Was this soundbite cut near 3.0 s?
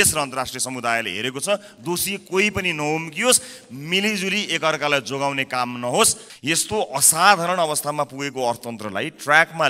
no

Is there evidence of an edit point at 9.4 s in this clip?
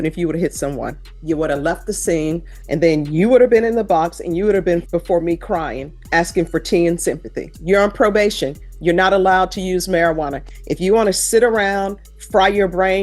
no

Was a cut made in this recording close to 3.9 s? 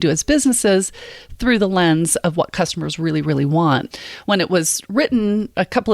yes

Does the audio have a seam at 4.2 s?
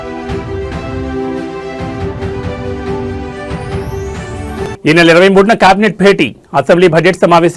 yes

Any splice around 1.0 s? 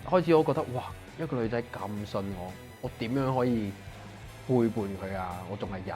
yes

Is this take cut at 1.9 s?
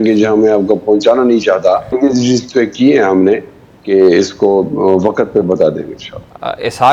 yes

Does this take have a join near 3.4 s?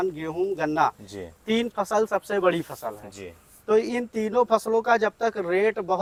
no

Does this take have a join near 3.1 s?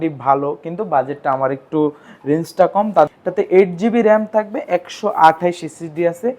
yes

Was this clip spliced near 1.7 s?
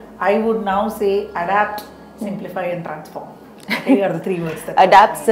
no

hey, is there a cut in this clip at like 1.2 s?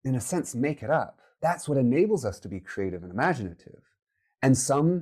yes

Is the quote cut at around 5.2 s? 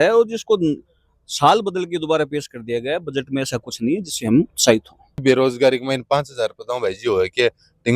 yes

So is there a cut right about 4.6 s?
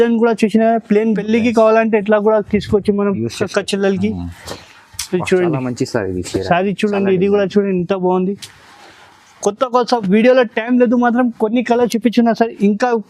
no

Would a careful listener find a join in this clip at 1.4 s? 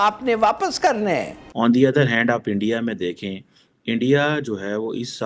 yes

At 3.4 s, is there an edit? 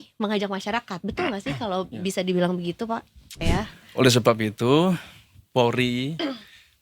yes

